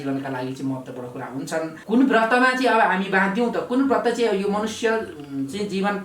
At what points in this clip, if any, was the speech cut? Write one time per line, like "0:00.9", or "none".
0:01.8